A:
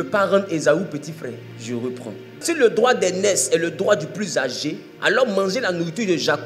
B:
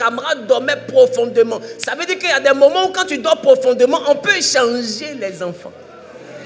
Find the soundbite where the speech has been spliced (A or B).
A